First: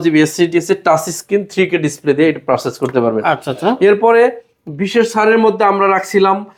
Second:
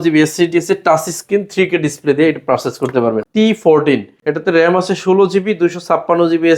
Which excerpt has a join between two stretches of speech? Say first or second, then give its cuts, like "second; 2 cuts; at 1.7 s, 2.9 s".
second; 2 cuts; at 3.2 s, 4.1 s